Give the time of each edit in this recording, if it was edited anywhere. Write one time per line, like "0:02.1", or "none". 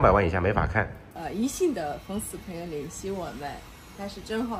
0:01.2